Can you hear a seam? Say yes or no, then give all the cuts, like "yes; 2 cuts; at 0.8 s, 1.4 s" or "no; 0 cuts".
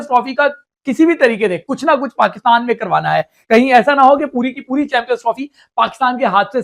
no; 0 cuts